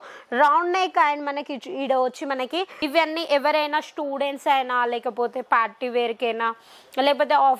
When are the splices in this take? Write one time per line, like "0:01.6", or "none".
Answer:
0:02.7